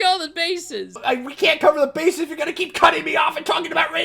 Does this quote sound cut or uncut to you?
cut